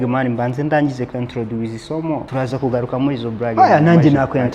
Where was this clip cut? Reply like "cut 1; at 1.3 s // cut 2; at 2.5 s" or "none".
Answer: cut 1; at 2.3 s // cut 2; at 3.5 s

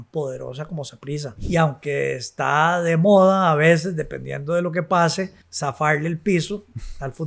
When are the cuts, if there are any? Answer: cut 1; at 1.3 s // cut 2; at 5.4 s

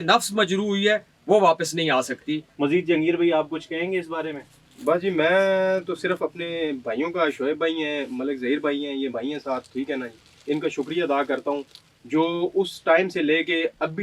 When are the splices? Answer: cut 1; at 2.4 s

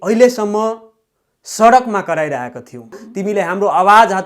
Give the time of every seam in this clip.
cut 1; at 3.1 s

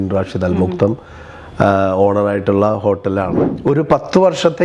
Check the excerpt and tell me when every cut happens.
cut 1; at 3.4 s

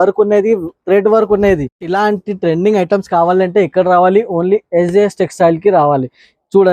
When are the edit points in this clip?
cut 1; at 1.8 s

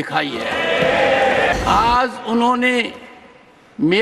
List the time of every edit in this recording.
cut 1; at 1.5 s

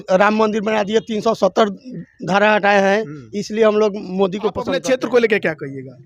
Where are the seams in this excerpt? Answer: cut 1; at 4.8 s

